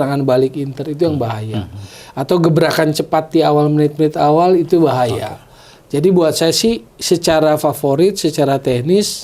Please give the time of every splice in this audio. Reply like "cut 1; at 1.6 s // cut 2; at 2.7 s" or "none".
none